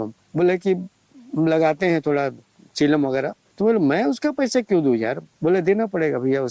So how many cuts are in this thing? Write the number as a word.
two